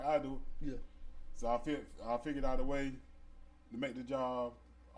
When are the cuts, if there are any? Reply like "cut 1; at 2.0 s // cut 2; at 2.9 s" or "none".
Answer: none